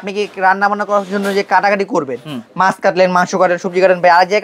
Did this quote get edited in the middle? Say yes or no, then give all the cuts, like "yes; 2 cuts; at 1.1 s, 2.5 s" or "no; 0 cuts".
no; 0 cuts